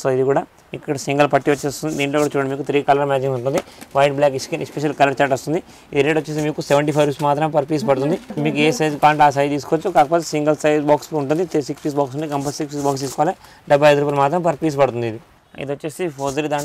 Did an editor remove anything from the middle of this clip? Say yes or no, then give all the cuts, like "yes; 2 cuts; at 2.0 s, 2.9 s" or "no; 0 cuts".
no; 0 cuts